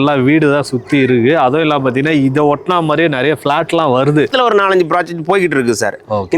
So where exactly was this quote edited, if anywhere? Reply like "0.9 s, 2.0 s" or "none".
4.3 s